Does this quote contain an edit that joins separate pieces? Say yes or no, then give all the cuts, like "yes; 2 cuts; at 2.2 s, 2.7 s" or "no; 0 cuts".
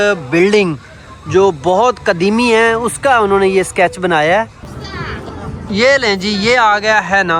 yes; 1 cut; at 5.1 s